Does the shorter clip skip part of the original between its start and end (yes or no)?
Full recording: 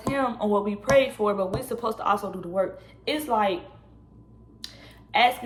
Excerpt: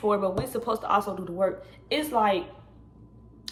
no